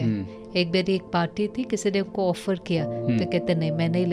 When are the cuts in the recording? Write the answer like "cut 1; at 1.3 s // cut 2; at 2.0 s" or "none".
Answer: none